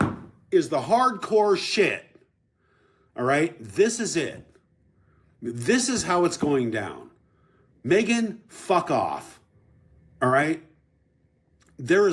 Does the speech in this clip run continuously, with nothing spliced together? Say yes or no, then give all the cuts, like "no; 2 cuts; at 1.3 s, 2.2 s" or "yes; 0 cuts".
yes; 0 cuts